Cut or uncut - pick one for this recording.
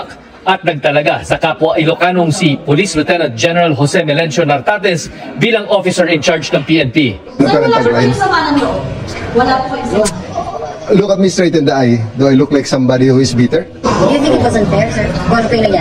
uncut